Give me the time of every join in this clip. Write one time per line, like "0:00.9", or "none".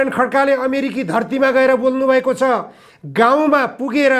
none